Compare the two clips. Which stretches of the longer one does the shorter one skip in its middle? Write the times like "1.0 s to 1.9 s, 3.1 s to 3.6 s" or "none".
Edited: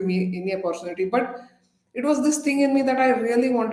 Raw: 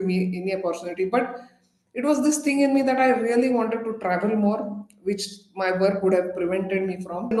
none